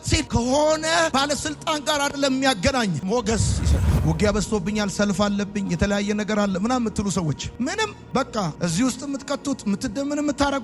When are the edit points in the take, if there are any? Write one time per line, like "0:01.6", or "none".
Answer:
0:03.7

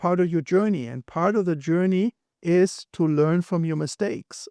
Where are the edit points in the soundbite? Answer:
0:02.3

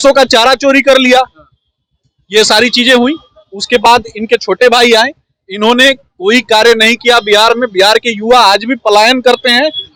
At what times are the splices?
none

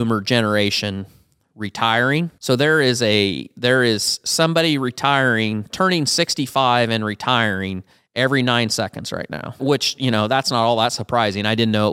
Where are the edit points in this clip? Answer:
0:02.4
0:09.6

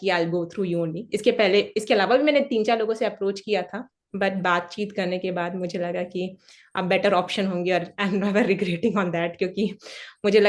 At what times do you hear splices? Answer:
none

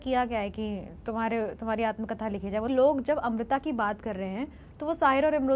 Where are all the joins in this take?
0:02.7

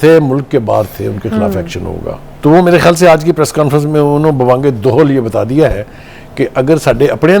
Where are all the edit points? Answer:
0:02.2

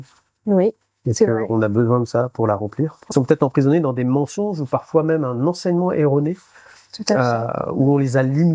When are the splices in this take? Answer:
0:03.0

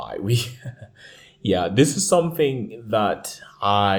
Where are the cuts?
none

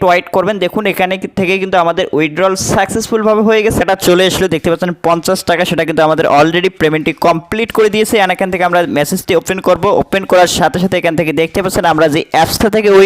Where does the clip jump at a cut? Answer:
0:03.8

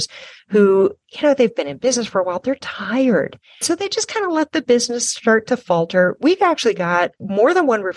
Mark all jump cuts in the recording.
0:03.6

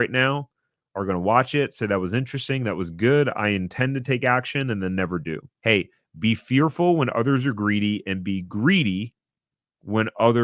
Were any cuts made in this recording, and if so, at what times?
0:05.5

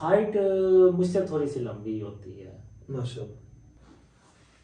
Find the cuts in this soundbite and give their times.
0:03.6

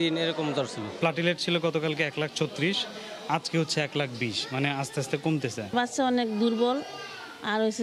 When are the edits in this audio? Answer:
none

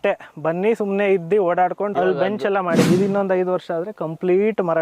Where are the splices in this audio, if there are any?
0:02.8

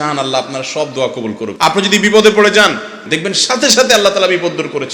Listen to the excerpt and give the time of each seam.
0:01.5
0:03.1

